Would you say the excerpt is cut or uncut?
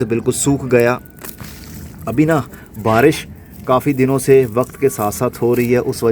uncut